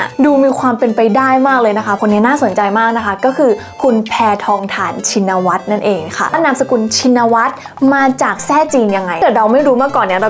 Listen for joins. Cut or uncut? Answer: cut